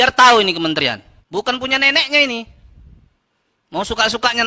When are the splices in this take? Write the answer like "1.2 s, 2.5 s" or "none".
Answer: 1.1 s